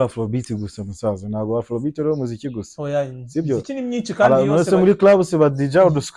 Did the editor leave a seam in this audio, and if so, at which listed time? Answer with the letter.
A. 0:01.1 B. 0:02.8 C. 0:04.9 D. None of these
D